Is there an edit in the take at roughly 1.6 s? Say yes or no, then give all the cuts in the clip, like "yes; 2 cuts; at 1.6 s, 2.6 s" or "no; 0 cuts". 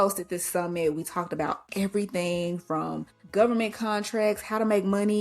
no; 1 cut; at 3.1 s